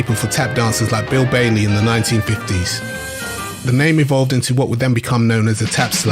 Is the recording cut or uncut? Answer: cut